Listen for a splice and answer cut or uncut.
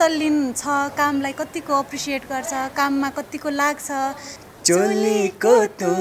cut